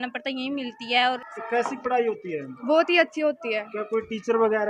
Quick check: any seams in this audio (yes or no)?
yes